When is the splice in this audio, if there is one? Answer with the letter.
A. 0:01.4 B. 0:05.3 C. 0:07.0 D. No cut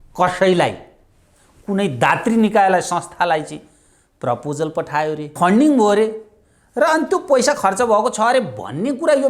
B